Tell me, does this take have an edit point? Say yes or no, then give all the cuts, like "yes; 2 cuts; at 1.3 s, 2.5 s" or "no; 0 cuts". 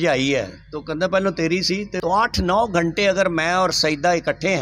yes; 1 cut; at 1.9 s